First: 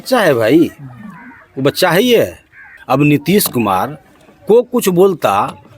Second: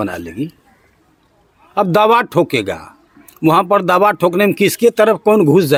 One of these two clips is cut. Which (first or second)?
first